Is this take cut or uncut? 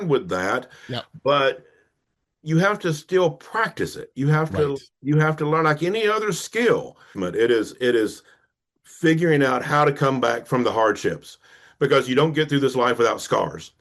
cut